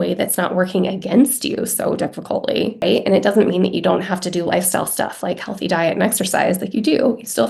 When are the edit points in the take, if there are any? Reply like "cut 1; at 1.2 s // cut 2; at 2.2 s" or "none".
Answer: cut 1; at 2.8 s